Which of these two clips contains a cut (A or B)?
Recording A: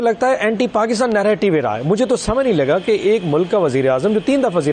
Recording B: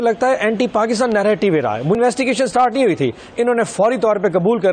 B